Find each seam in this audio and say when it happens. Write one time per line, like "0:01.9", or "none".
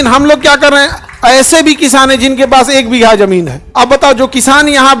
0:03.6